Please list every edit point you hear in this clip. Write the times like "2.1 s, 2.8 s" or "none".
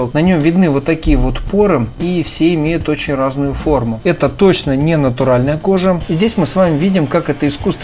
2.0 s, 4.0 s, 6.0 s